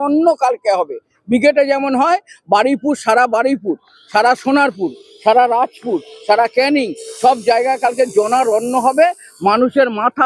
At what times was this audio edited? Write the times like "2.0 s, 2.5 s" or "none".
none